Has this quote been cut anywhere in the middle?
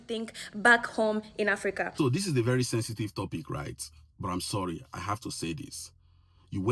yes; 1 cut; at 1.9 s

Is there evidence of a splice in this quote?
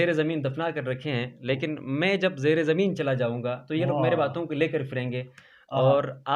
no; 0 cuts

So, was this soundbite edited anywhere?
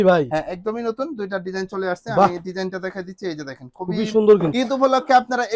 yes; 1 cut; at 4.5 s

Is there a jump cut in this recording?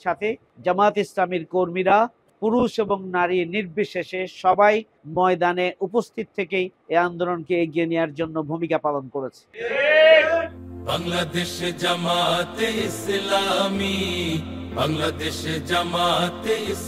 yes; 1 cut; at 10.5 s

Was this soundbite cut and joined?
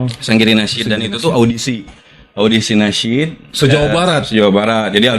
no; 0 cuts

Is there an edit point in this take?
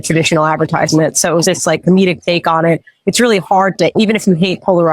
yes; 2 cuts; at 1.4 s, 3.9 s

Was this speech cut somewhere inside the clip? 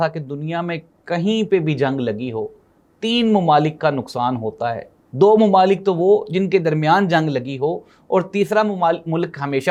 no; 0 cuts

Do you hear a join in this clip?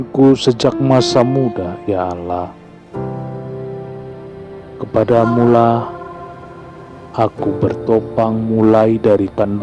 no; 0 cuts

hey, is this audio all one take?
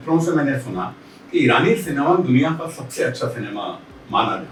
yes; 0 cuts

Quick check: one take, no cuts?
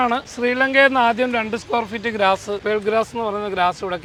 yes; 0 cuts

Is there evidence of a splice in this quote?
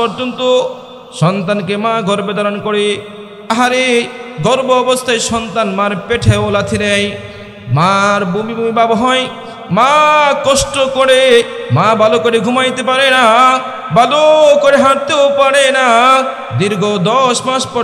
no; 0 cuts

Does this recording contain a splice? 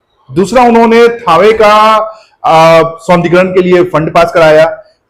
no; 0 cuts

